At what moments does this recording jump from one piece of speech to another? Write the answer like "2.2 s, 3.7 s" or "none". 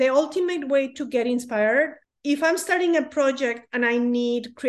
2.1 s